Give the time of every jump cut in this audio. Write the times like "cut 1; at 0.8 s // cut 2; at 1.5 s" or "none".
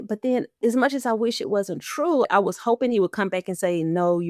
cut 1; at 2.2 s